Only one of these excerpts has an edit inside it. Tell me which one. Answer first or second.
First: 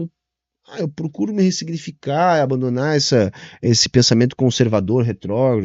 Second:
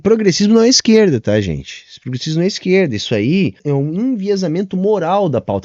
second